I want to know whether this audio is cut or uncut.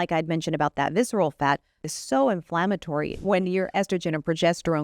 cut